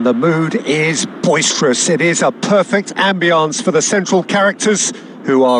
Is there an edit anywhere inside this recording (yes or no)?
no